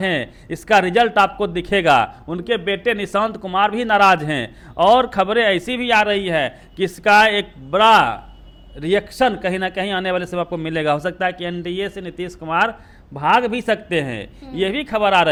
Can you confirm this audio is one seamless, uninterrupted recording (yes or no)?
yes